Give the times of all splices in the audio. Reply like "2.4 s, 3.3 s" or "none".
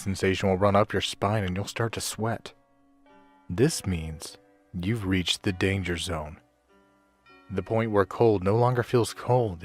5.0 s